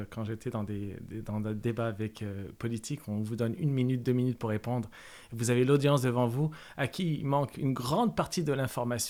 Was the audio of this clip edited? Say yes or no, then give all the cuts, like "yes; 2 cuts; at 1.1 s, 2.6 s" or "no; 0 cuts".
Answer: no; 0 cuts